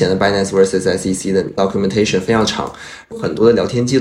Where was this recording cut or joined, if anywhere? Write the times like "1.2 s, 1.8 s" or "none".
1.5 s, 3.1 s